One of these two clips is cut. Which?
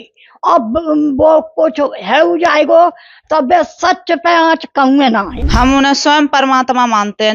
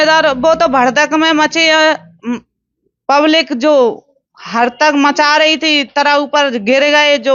first; 1 cut; at 5.4 s

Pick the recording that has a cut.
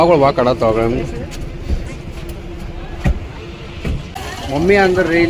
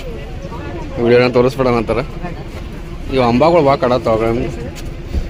first; 1 cut; at 4.4 s

